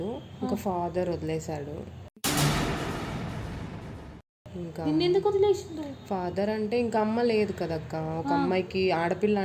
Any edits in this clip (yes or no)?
no